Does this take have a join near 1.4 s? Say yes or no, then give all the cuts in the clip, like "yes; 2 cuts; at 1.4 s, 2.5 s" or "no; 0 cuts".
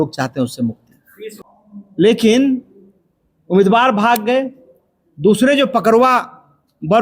yes; 1 cut; at 1.4 s